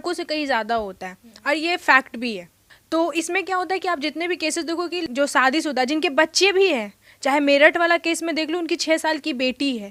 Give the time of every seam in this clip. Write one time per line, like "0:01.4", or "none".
none